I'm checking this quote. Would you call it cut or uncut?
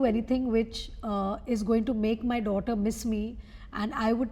uncut